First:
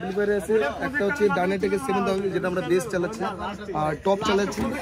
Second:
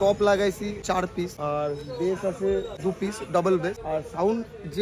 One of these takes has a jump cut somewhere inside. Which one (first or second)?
second